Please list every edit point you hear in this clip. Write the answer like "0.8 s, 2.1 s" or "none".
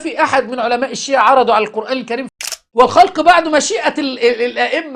2.3 s